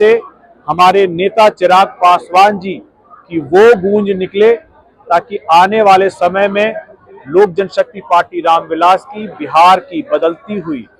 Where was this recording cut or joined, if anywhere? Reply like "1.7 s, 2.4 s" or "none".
none